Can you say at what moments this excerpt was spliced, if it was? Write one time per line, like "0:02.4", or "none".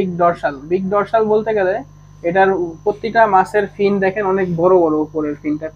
none